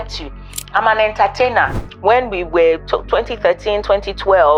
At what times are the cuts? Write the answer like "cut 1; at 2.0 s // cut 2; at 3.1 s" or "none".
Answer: cut 1; at 1.8 s